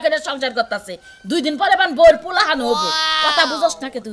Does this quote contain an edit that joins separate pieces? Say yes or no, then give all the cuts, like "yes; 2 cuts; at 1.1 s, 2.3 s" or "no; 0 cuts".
no; 0 cuts